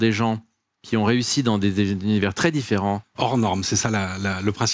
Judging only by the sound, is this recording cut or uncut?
cut